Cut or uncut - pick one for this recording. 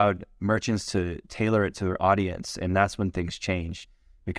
uncut